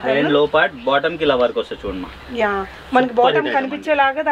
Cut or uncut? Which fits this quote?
uncut